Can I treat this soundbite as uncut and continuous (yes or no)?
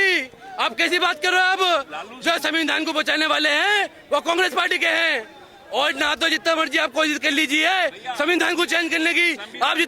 yes